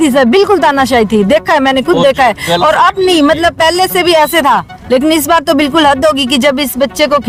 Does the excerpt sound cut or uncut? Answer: uncut